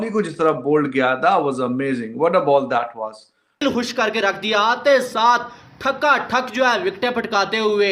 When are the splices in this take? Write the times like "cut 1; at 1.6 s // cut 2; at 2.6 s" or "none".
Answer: cut 1; at 3.6 s